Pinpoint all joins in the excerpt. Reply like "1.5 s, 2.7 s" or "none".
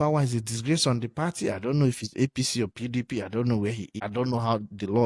3.9 s